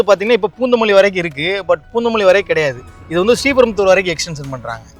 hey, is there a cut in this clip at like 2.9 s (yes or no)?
no